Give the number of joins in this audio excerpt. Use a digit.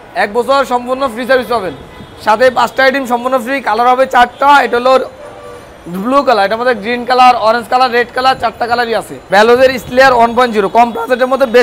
1